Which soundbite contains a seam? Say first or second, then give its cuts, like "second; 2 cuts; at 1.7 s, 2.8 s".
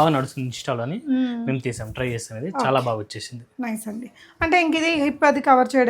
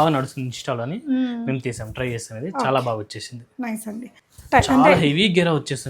second; 1 cut; at 4.2 s